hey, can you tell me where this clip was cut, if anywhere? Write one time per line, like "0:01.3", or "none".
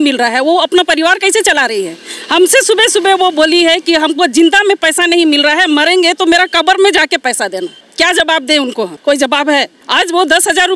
0:07.8
0:08.9
0:09.8